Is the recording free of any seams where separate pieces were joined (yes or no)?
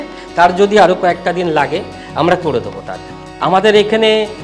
no